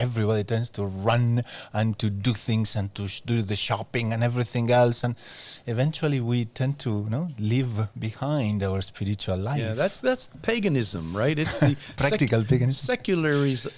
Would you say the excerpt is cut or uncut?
uncut